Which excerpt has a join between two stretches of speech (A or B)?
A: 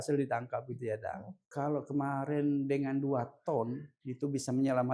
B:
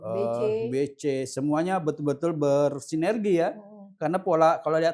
A